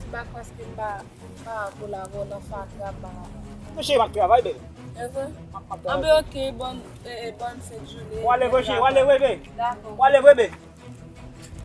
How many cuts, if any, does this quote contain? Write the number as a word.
one